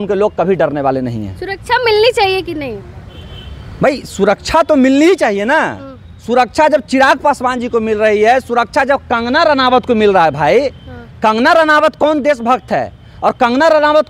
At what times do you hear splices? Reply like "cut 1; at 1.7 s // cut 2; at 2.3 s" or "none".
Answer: none

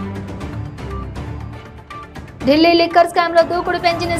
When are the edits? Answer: cut 1; at 2.3 s

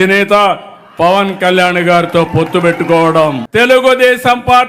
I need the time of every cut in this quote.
cut 1; at 3.4 s

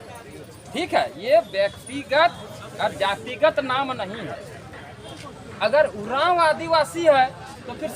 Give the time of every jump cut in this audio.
cut 1; at 5.1 s

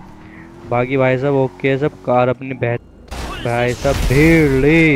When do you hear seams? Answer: cut 1; at 2.8 s

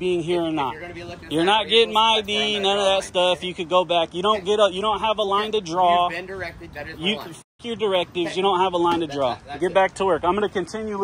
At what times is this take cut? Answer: none

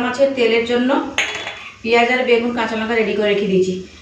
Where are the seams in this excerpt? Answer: none

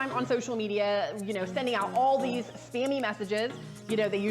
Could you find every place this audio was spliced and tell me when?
cut 1; at 3.1 s

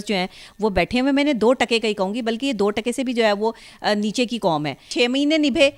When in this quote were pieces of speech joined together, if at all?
cut 1; at 4.9 s

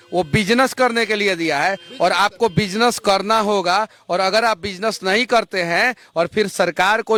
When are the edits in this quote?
none

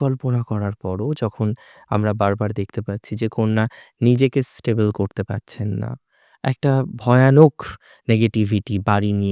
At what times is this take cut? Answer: none

